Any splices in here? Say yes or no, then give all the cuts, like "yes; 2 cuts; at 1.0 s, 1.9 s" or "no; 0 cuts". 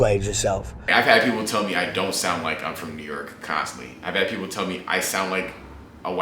no; 0 cuts